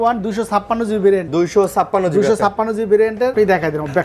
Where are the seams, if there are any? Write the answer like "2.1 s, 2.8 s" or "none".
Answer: 1.3 s, 3.3 s